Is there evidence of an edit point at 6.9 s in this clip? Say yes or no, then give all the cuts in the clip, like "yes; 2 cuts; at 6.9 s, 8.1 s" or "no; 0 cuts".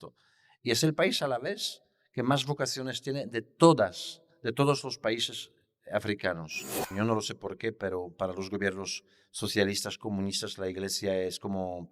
yes; 1 cut; at 6.9 s